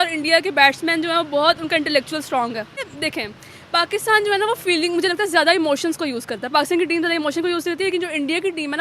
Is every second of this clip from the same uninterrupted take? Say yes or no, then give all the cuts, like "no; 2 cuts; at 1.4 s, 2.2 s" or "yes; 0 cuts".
no; 1 cut; at 2.9 s